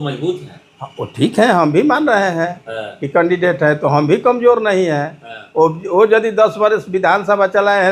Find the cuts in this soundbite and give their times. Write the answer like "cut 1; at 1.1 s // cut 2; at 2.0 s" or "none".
none